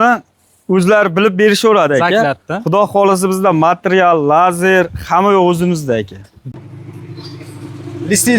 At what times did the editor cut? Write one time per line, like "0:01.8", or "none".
0:06.5